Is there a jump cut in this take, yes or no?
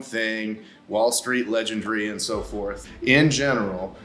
yes